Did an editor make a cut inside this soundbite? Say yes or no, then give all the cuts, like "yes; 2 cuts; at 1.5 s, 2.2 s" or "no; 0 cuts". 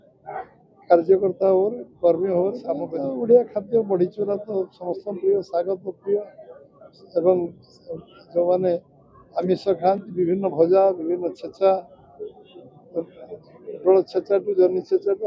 yes; 1 cut; at 2.9 s